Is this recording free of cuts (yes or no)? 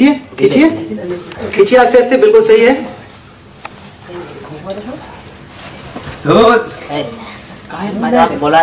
yes